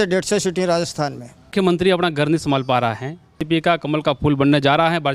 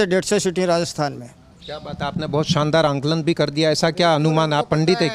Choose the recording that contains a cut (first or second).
first